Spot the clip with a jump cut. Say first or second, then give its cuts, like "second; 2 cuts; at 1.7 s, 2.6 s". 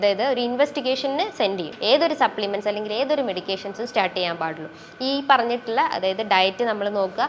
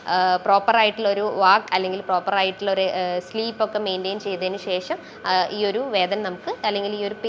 first; 1 cut; at 1.7 s